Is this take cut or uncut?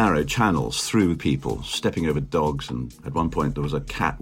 cut